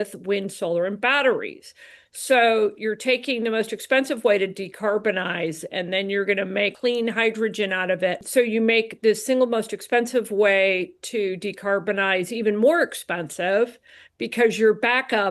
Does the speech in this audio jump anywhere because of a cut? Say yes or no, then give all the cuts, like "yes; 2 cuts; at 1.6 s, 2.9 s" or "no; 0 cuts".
yes; 2 cuts; at 6.7 s, 8.2 s